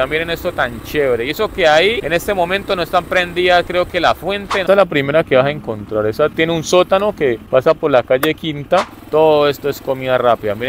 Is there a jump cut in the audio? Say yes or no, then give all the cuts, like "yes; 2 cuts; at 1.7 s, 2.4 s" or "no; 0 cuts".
yes; 5 cuts; at 2.0 s, 4.6 s, 6.3 s, 7.4 s, 9.0 s